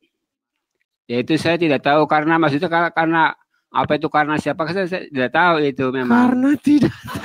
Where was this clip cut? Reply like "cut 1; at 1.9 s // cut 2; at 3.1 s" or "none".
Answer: none